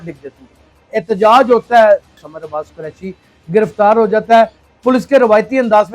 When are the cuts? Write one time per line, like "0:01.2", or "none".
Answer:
0:00.9
0:02.1
0:04.6